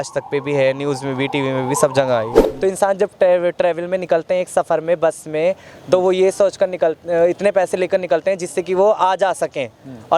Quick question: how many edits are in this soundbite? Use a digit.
1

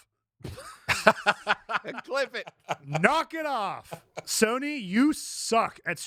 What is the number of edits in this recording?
0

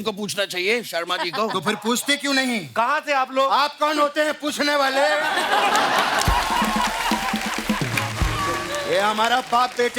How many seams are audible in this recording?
0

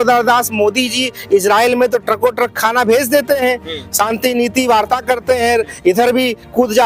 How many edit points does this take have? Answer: 0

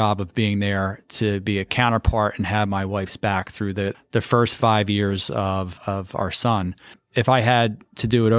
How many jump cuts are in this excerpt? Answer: 3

